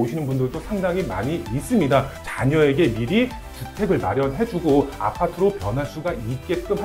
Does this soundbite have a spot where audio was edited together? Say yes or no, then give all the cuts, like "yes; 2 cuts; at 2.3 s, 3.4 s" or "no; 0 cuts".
yes; 1 cut; at 2.2 s